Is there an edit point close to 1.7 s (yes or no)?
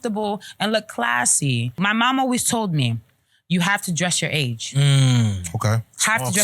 yes